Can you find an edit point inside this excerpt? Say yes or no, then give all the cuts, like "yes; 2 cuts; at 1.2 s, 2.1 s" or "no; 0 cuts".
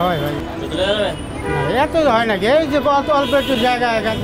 no; 0 cuts